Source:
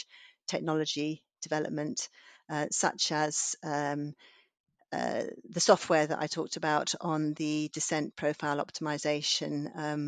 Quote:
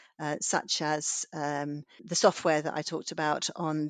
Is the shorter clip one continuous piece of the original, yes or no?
no